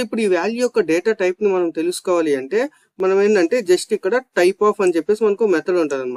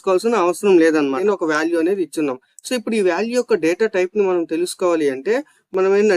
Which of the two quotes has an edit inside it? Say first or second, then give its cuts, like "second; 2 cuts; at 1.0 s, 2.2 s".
second; 1 cut; at 1.2 s